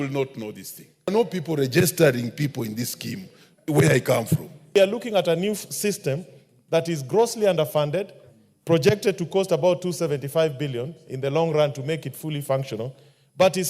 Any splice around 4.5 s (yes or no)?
yes